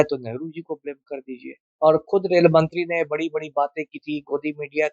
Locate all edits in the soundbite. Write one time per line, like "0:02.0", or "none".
0:01.6